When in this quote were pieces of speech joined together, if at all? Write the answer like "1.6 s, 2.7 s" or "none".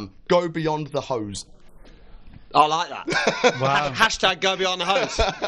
none

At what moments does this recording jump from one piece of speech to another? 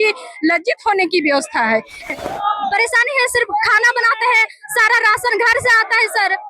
2.1 s

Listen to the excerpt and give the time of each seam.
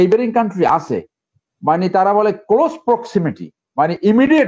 none

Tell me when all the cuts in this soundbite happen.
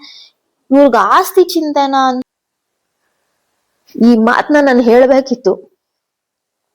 2.3 s

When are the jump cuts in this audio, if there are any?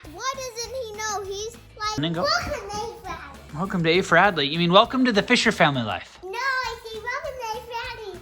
2.0 s

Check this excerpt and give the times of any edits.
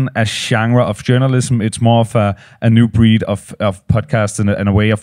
none

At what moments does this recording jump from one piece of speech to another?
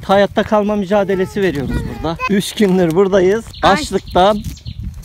2.2 s, 3.5 s

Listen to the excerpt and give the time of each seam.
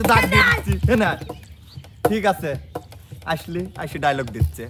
none

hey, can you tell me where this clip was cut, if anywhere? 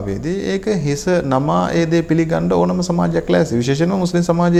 none

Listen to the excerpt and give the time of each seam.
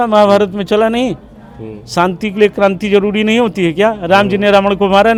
none

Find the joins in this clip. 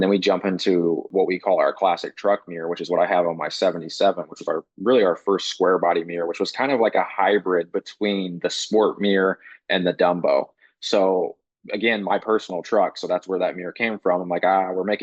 1.1 s

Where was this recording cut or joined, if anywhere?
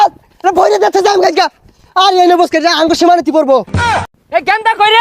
4.0 s

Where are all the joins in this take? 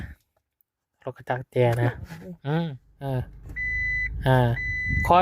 2.9 s

